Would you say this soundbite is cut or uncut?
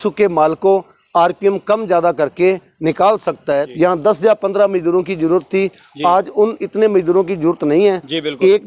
cut